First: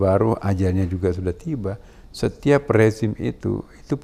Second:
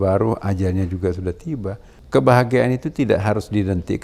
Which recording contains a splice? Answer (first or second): second